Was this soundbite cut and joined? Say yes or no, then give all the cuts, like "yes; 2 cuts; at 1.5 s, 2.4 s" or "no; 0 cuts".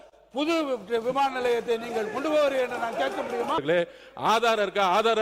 yes; 1 cut; at 3.6 s